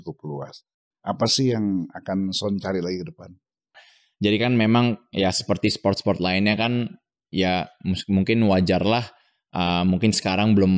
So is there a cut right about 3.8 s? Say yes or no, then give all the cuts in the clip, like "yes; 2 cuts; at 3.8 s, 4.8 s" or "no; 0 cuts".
yes; 1 cut; at 3.8 s